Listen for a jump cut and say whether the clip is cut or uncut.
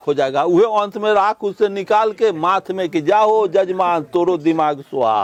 uncut